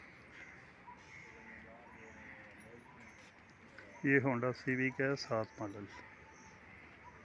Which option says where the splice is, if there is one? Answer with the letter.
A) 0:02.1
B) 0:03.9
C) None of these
C